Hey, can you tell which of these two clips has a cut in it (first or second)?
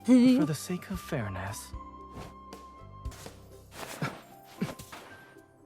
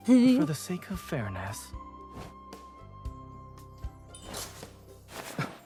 first